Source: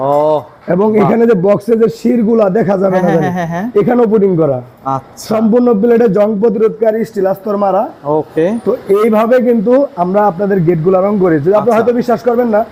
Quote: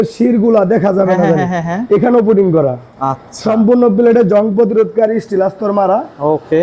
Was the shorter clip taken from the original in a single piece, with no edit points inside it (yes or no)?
yes